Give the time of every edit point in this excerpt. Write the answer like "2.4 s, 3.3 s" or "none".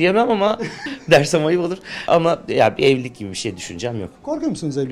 0.8 s, 2.1 s

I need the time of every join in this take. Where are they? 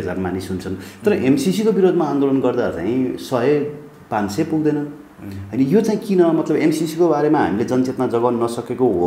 none

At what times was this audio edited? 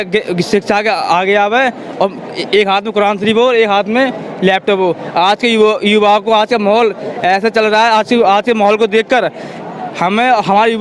none

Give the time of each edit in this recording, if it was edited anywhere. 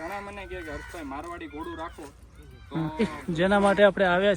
3.2 s

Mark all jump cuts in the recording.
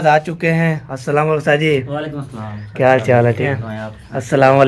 3.5 s

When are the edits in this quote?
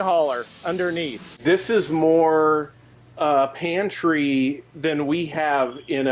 1.2 s

